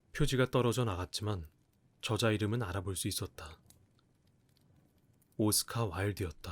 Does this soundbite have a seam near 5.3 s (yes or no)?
yes